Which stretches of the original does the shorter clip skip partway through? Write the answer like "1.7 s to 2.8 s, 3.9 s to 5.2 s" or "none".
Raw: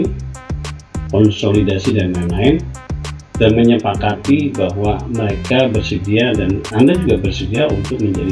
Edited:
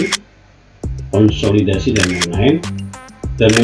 none